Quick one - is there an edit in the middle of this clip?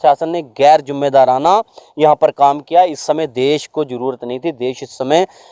no; 0 cuts

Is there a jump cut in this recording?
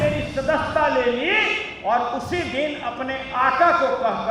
no; 0 cuts

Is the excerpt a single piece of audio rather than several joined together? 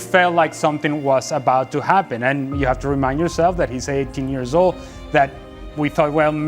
no; 1 cut; at 2.2 s

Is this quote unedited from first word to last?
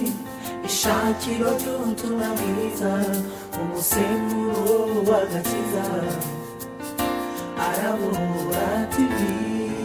yes; 0 cuts

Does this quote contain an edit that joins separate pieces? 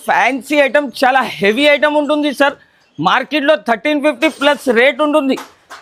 no; 0 cuts

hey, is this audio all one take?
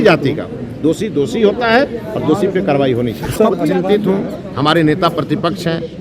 no; 1 cut; at 3.7 s

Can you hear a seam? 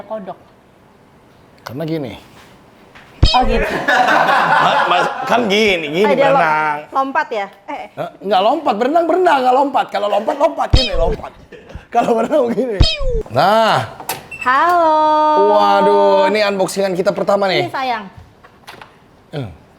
yes; 1 cut; at 13.2 s

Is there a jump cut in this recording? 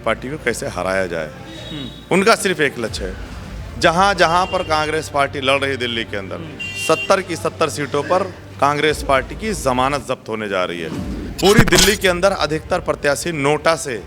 yes; 1 cut; at 11.3 s

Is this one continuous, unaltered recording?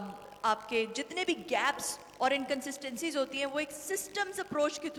yes; 0 cuts

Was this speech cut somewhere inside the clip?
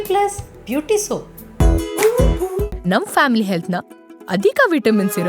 yes; 1 cut; at 1.4 s

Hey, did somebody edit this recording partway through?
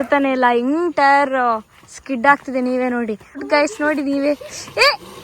yes; 1 cut; at 3.4 s

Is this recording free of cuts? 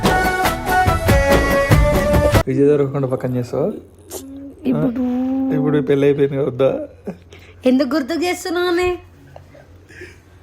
yes; 0 cuts

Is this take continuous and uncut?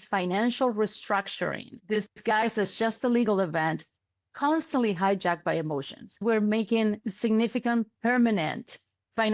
no; 2 cuts; at 1.7 s, 6.2 s

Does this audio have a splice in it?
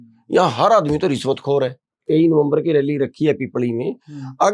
yes; 1 cut; at 2.0 s

